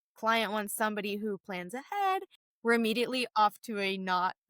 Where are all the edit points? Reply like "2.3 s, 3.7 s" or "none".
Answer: 2.4 s